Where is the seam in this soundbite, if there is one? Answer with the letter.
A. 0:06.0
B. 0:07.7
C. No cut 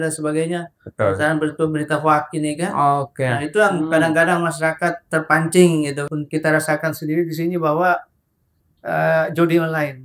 A